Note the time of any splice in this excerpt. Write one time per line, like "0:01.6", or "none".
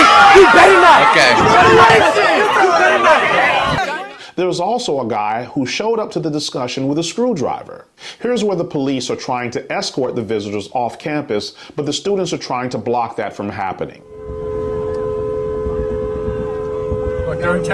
0:14.3